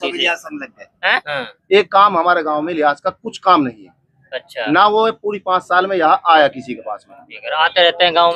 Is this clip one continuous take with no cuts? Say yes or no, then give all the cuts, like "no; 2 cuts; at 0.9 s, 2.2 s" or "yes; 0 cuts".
no; 1 cut; at 1.2 s